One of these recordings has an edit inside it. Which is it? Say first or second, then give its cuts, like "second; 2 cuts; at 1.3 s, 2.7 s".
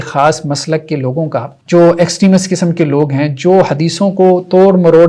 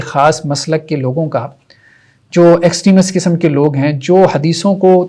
first; 1 cut; at 1.5 s